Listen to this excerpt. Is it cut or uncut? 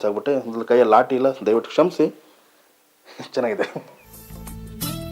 uncut